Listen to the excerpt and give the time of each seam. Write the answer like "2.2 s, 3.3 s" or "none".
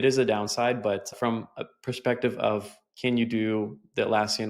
1.1 s

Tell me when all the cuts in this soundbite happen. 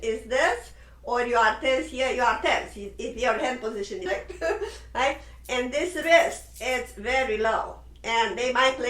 4.0 s

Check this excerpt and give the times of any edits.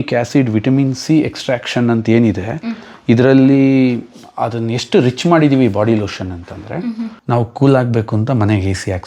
7.2 s

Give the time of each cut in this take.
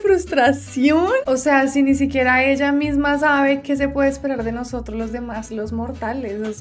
1.2 s

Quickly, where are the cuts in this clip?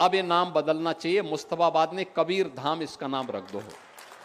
none

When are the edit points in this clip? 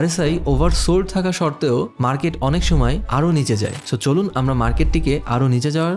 none

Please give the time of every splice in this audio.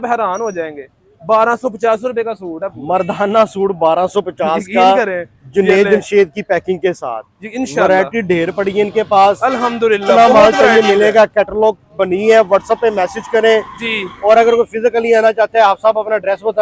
none

